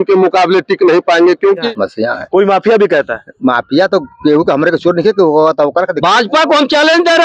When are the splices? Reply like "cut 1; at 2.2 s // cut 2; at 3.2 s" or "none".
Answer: cut 1; at 1.7 s // cut 2; at 6.3 s